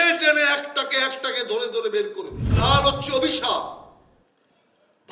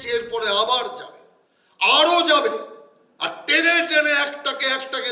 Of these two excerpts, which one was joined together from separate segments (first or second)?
first